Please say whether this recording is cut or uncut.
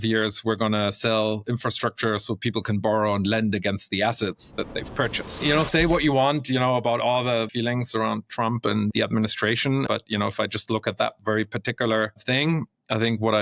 cut